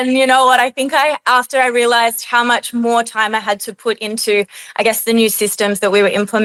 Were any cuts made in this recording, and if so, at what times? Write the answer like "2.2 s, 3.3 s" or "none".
none

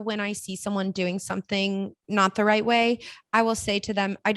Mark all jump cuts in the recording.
2.0 s

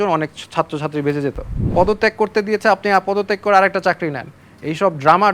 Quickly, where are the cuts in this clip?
1.6 s

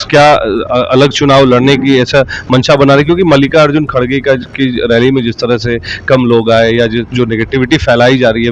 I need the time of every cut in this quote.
none

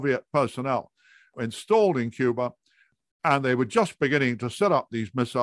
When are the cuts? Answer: 1.3 s, 2.9 s

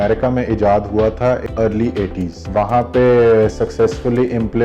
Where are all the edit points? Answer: 1.4 s, 2.4 s

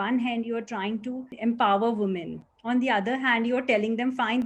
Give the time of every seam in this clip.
1.3 s

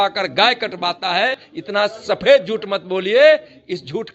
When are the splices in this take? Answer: 1.5 s

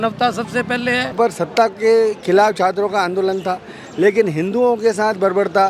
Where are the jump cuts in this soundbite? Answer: 1.1 s

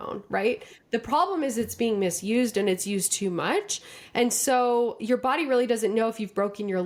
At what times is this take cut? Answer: none

